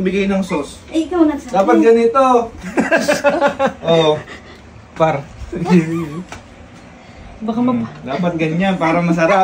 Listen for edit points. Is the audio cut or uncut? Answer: uncut